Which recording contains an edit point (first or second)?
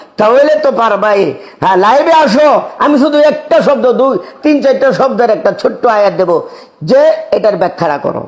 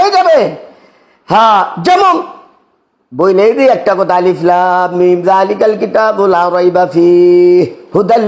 first